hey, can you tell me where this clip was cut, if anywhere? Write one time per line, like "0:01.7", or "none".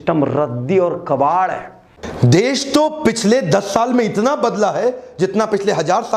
0:01.9